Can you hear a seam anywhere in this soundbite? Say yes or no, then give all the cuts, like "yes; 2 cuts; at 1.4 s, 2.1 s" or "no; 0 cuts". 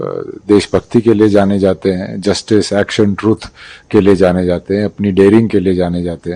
no; 0 cuts